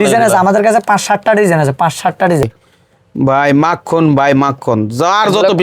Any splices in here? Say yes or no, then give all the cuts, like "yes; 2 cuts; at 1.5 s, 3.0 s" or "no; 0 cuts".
yes; 1 cut; at 2.7 s